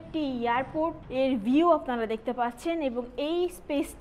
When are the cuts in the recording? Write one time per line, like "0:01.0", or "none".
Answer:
0:01.0

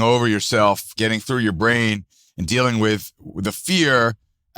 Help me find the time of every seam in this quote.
0:00.9

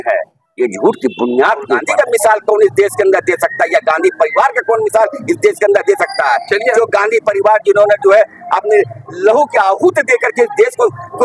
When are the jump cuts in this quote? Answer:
0:01.9

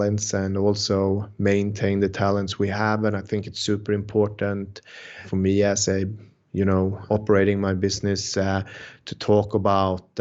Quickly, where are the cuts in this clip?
none

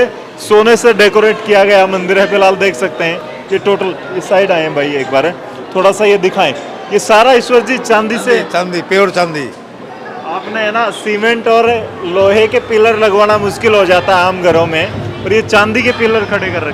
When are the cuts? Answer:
none

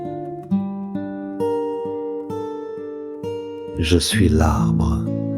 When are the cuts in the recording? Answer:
none

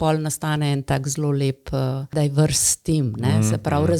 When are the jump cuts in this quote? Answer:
0:02.1

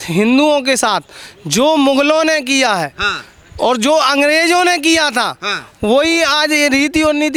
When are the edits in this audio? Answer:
none

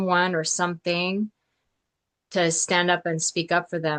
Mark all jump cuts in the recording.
none

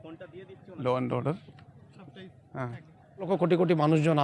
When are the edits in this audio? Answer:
0:03.3

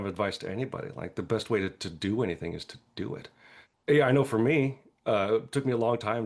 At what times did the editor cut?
none

